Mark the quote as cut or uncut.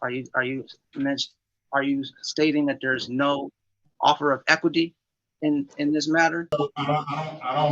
cut